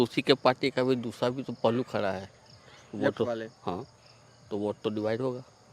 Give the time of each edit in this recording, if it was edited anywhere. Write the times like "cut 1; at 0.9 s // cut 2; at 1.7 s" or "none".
none